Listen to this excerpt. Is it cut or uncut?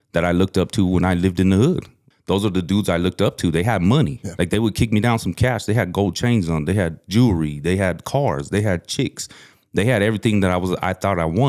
cut